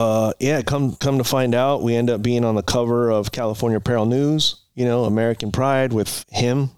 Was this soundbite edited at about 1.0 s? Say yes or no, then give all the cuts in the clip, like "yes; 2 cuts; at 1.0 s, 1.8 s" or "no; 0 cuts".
yes; 1 cut; at 1.0 s